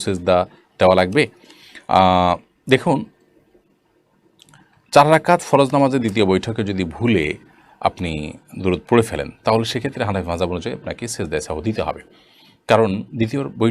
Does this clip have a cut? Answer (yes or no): no